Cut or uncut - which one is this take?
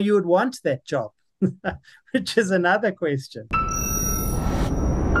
cut